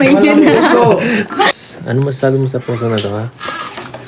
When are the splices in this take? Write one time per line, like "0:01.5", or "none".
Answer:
0:01.5